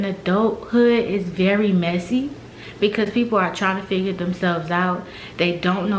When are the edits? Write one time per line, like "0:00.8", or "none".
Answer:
none